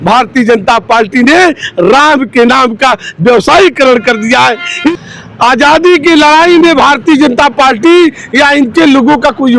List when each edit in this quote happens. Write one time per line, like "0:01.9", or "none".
0:04.9

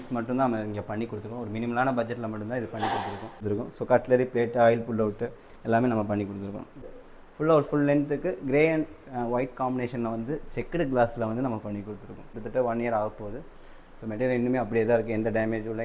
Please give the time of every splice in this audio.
0:03.4
0:07.0
0:12.4

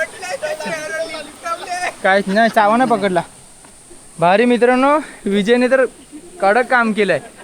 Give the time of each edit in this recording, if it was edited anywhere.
none

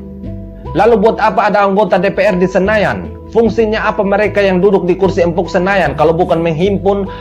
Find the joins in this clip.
none

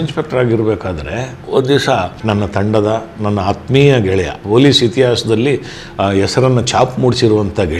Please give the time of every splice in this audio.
0:01.4
0:02.2
0:04.4

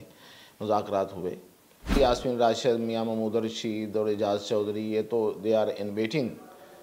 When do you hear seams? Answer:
0:02.0

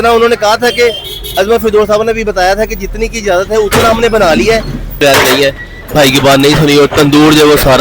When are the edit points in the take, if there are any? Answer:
0:05.0

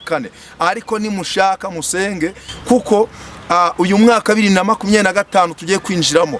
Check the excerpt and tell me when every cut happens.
none

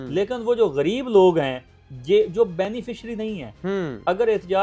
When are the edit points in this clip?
none

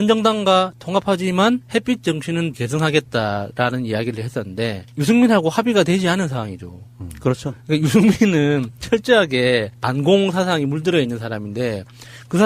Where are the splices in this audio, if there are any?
0:08.7

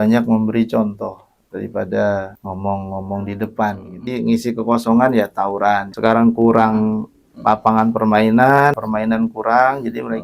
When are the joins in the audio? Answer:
0:04.1
0:08.8

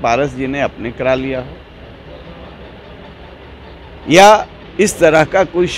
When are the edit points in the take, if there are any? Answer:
0:04.6

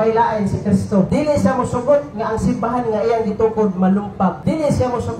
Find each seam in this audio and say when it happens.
0:01.1
0:04.4

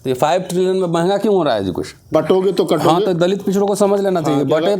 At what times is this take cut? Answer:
0:02.1

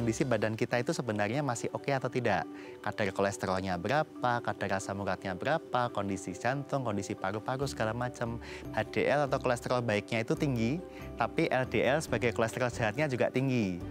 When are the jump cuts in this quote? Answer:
0:08.6

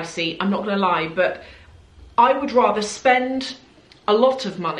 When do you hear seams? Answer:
none

